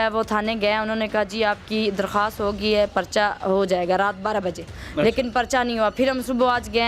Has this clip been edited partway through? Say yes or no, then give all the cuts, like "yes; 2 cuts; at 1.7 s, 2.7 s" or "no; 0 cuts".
no; 0 cuts